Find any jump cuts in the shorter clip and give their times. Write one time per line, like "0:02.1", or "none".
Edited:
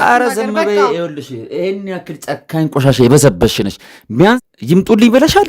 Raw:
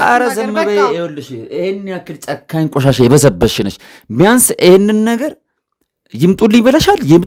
0:04.4

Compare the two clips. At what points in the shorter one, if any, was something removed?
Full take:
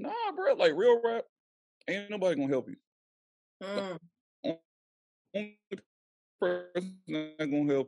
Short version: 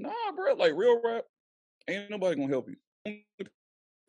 0:03.1

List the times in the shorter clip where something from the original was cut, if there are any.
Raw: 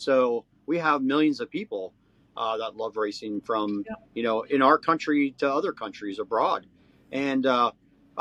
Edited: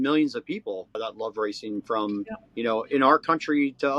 0:01.0

